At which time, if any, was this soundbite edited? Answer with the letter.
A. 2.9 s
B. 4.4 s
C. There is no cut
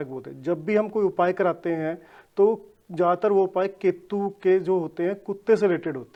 C